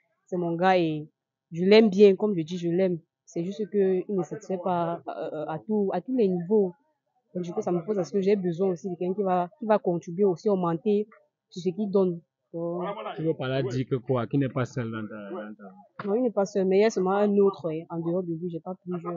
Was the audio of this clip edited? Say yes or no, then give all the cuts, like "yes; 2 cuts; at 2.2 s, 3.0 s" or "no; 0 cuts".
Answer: no; 0 cuts